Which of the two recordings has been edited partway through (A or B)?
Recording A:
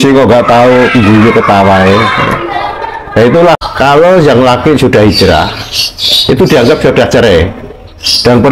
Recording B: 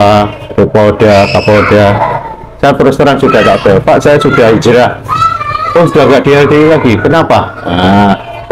A